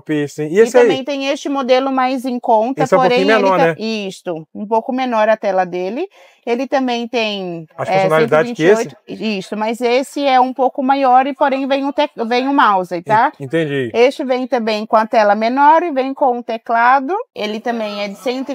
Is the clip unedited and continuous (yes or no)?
no